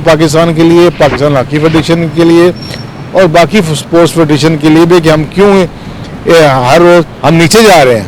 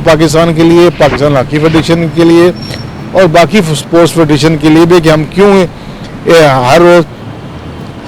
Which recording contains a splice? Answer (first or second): first